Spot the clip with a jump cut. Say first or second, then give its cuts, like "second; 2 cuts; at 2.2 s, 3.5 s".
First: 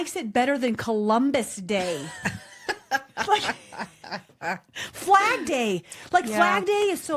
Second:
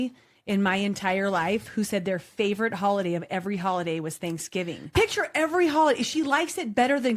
second; 1 cut; at 4.9 s